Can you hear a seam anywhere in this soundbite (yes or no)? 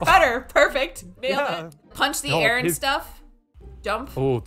no